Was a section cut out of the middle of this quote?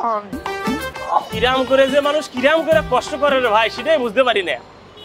yes; 1 cut; at 0.9 s

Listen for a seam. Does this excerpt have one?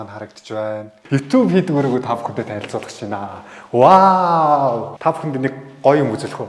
yes; 2 cuts; at 1.0 s, 4.9 s

